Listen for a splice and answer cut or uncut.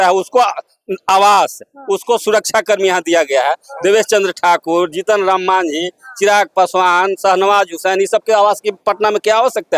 uncut